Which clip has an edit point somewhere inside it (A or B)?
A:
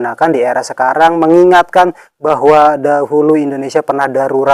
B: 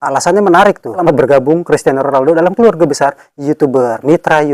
B